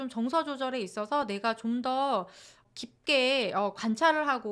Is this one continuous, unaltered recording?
no; 1 cut; at 2.6 s

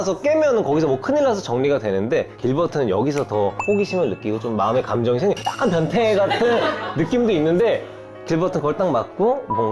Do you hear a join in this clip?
yes; 1 cut; at 8.3 s

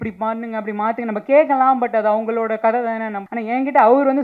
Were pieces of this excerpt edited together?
yes; 1 cut; at 3.2 s

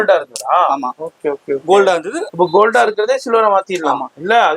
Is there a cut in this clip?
no; 0 cuts

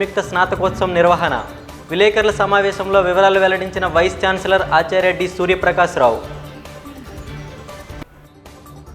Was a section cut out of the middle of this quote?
yes; 1 cut; at 6.3 s

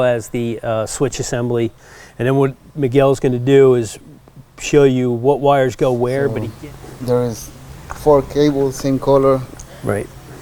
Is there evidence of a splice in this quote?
yes; 1 cut; at 6.4 s

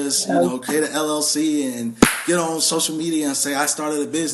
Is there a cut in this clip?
no; 0 cuts

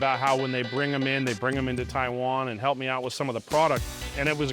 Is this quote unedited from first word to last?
yes; 0 cuts

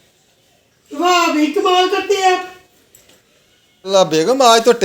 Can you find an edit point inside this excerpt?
yes; 1 cut; at 3.9 s

